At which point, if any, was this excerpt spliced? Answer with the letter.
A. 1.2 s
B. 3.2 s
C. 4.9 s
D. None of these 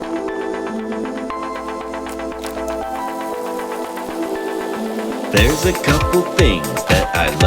A